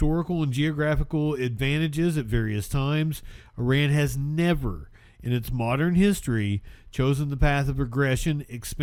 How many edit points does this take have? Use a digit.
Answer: 0